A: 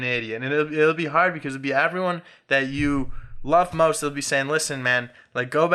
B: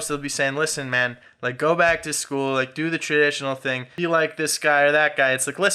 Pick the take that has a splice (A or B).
B